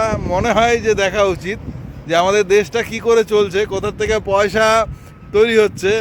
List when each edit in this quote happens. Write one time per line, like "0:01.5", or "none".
none